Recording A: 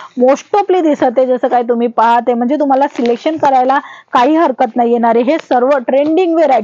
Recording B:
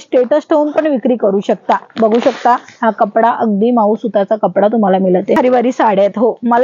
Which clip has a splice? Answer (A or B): B